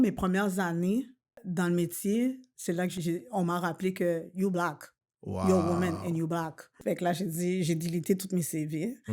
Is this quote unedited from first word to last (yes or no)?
no